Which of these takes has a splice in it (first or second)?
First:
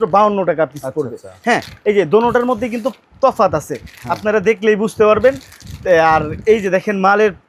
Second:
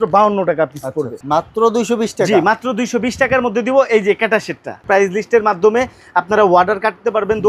second